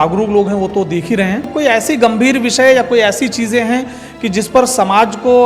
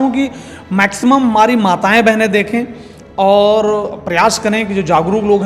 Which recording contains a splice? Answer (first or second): first